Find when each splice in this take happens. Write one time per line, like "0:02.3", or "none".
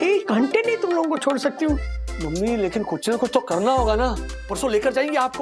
0:01.8